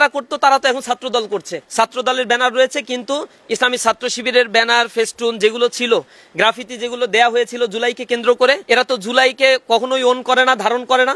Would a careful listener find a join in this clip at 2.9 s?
no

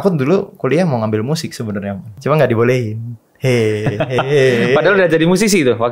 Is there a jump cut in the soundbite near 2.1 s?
yes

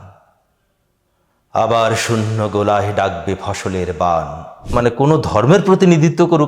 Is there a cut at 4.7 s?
yes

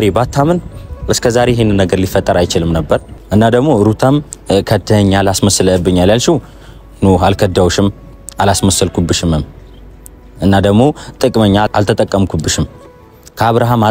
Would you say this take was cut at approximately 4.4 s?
no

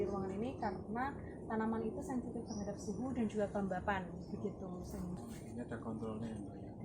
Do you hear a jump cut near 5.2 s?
yes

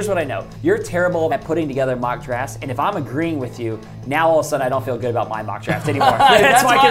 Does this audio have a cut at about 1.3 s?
yes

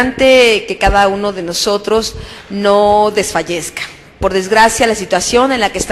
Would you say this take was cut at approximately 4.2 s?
no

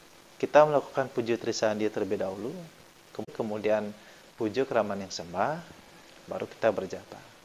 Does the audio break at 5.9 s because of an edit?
no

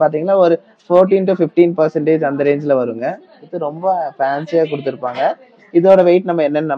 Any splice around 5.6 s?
no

